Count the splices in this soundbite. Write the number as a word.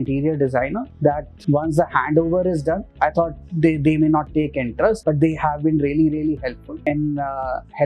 four